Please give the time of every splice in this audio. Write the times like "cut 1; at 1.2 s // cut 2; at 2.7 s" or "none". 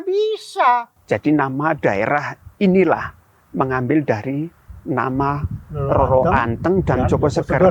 cut 1; at 0.9 s